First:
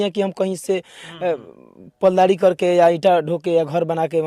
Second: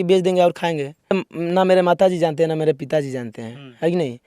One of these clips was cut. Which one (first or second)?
second